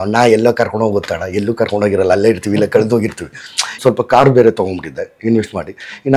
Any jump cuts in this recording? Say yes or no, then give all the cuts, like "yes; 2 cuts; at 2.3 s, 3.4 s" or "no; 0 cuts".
yes; 1 cut; at 3.8 s